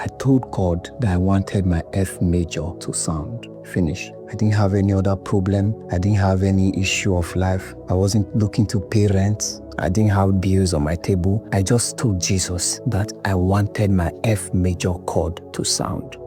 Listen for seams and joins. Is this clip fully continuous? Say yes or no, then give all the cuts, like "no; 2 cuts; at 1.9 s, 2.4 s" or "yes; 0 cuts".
yes; 0 cuts